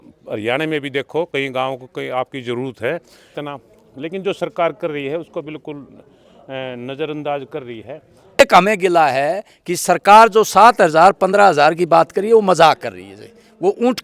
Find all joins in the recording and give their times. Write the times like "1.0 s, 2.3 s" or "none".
3.4 s, 8.4 s